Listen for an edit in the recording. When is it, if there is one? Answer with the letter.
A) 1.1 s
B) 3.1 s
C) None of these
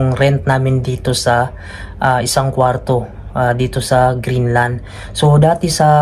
C